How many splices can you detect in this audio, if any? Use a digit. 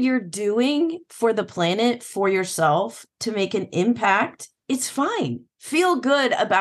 1